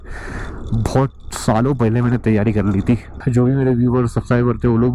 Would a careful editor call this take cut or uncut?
cut